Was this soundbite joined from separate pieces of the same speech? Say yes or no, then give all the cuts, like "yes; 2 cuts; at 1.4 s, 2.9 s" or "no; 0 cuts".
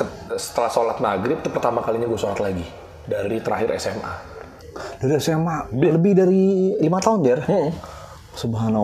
no; 0 cuts